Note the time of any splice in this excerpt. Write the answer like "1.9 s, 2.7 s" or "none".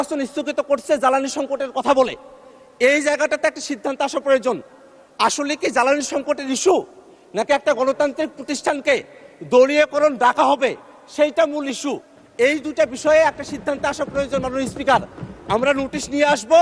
none